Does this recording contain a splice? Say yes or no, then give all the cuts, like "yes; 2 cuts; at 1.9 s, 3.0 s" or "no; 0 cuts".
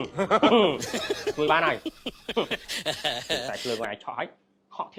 no; 0 cuts